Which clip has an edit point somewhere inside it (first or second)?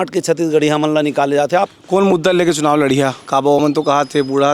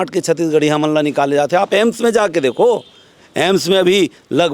first